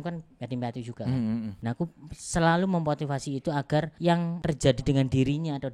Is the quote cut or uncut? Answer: cut